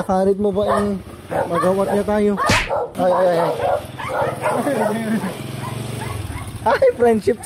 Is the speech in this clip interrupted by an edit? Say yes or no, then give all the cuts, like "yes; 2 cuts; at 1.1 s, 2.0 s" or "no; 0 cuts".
yes; 1 cut; at 2.9 s